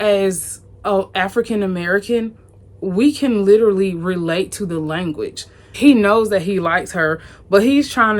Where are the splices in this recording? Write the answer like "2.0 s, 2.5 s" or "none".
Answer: 5.6 s